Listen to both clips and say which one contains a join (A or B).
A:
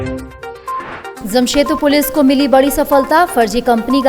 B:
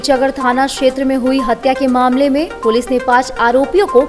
A